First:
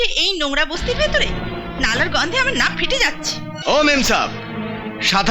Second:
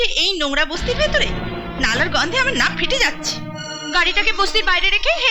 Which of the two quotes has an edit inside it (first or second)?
first